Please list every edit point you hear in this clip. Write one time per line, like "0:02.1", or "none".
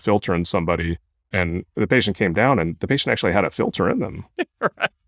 0:01.2